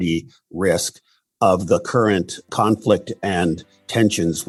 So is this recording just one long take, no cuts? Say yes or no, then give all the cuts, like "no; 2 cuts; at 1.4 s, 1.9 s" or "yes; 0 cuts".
yes; 0 cuts